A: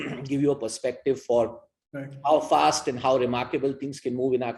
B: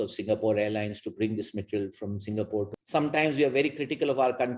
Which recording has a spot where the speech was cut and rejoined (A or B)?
B